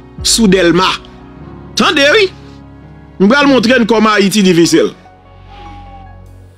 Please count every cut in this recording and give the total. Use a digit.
1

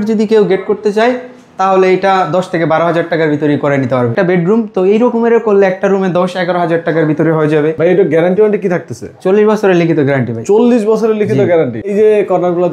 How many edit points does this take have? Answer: 3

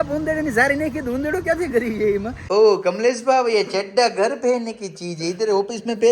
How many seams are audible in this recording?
1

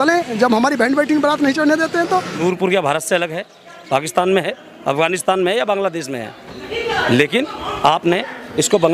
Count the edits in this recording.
1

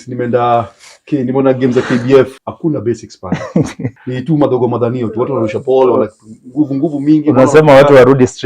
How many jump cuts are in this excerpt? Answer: 2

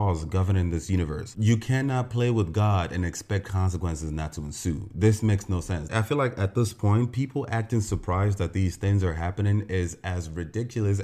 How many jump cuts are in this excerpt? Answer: 1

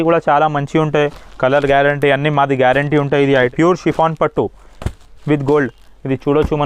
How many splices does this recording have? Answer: 1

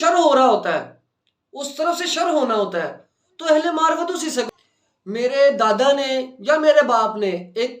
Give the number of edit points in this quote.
1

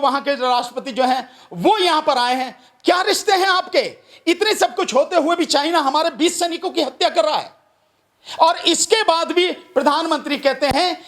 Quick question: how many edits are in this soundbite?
0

